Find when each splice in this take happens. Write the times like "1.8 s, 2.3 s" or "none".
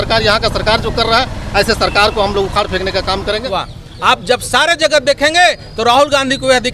3.4 s